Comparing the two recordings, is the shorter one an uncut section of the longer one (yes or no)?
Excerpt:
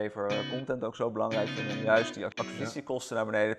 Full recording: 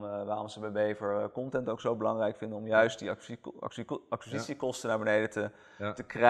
no